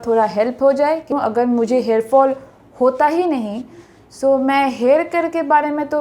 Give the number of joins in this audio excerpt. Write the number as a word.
one